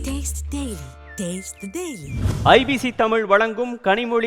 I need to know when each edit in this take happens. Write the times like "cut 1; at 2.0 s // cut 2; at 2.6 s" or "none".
cut 1; at 2.1 s